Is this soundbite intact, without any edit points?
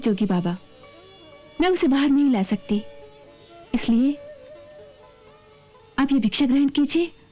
yes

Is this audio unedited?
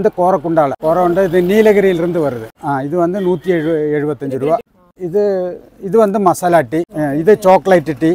yes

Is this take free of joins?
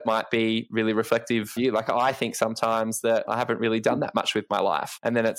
no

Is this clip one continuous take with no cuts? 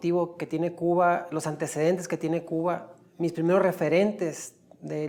yes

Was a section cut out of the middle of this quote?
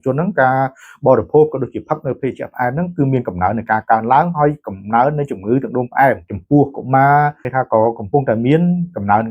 yes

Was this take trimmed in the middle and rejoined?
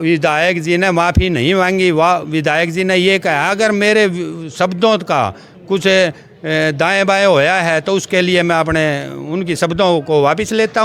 no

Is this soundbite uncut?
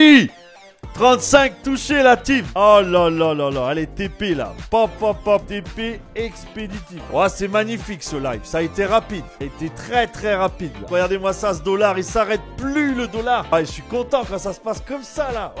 no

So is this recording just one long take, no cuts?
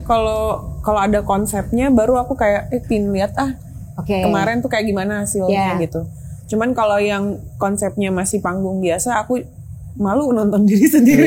yes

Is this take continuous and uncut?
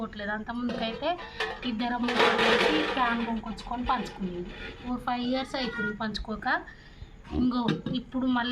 no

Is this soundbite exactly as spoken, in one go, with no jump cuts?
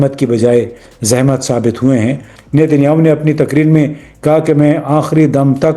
no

